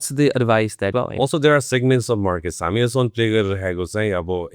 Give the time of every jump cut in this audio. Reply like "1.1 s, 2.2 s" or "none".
0.9 s